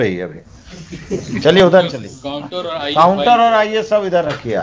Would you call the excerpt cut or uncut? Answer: uncut